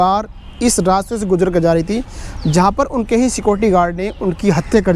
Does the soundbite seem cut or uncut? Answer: uncut